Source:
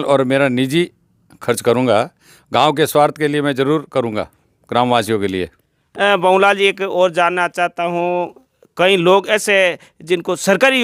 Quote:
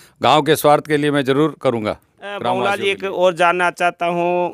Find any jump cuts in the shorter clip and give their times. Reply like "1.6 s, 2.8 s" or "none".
2.4 s